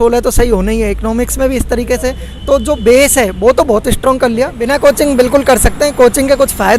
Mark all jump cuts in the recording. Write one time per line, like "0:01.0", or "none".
0:04.6

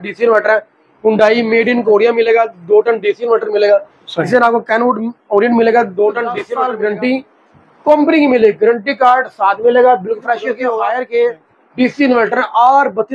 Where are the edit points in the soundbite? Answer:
0:06.4
0:10.7

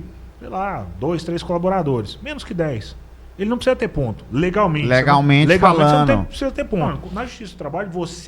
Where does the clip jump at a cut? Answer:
0:07.0

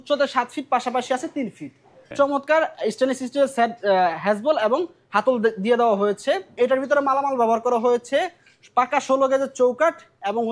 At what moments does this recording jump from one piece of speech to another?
0:02.1
0:06.5

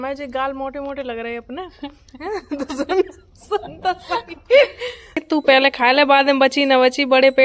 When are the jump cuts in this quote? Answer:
0:03.7
0:05.2

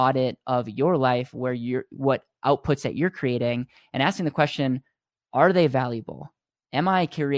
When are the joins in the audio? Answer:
none

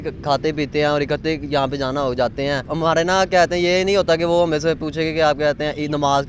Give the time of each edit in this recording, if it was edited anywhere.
0:02.7

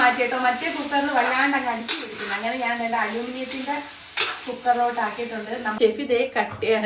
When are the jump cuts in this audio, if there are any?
0:05.8

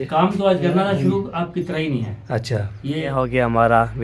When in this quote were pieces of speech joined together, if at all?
0:03.0

